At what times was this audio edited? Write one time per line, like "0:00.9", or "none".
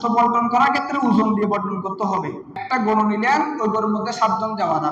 0:02.6